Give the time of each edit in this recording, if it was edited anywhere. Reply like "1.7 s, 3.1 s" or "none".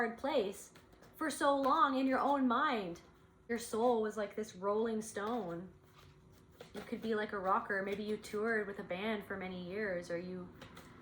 3.4 s